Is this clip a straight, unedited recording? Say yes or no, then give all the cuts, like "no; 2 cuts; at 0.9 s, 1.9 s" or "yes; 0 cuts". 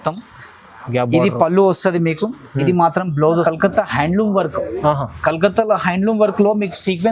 no; 1 cut; at 3.4 s